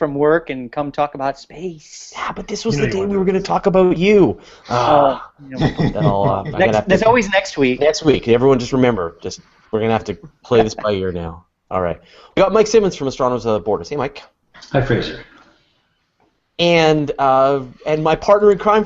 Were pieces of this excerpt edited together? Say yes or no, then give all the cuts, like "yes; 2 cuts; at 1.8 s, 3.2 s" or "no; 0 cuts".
yes; 1 cut; at 17.6 s